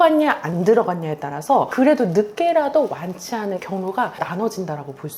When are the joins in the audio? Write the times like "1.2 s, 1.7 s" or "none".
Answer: 4.3 s